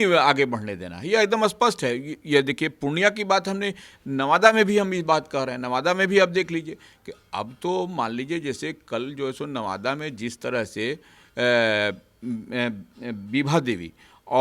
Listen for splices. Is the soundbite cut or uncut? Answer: uncut